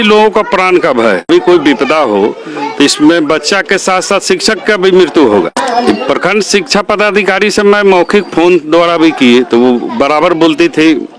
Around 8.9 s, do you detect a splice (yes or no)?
no